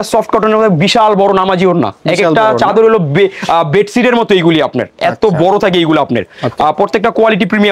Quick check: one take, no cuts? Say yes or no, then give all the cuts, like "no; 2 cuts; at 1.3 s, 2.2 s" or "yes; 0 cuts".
yes; 0 cuts